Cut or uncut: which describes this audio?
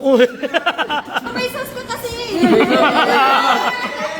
cut